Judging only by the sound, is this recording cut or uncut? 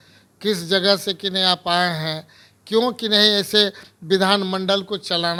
uncut